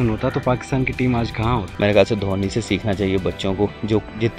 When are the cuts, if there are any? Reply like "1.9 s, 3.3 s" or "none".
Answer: 1.7 s